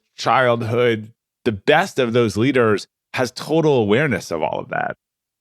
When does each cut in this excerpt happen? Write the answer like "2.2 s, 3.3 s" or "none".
1.1 s